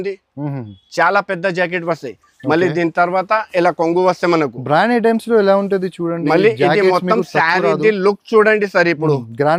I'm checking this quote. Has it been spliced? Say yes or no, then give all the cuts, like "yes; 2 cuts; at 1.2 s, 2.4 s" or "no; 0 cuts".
no; 0 cuts